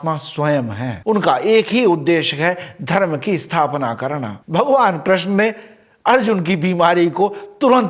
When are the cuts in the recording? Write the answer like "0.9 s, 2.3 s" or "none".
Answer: 1.0 s, 4.4 s